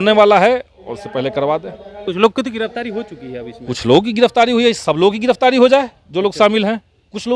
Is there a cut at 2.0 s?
yes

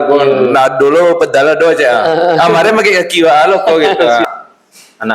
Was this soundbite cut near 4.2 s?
yes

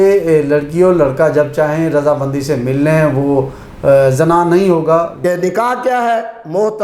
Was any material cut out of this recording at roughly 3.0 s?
no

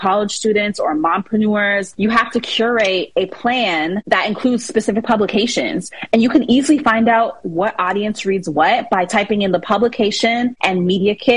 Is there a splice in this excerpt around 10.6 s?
yes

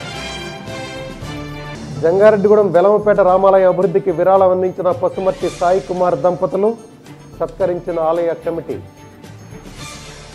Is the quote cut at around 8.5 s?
no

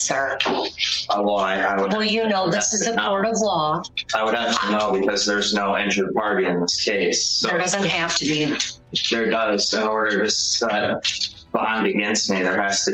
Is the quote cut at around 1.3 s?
no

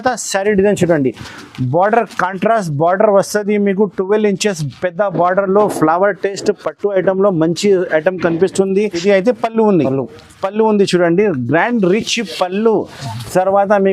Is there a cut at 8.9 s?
yes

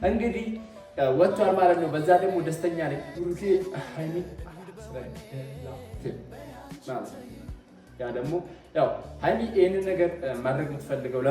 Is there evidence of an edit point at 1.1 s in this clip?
no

